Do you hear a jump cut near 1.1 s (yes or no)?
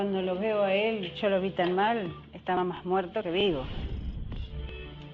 yes